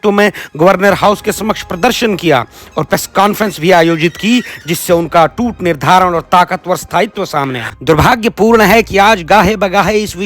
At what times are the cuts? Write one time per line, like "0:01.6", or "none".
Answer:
0:07.7